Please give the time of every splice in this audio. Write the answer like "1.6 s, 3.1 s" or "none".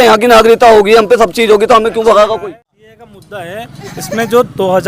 2.4 s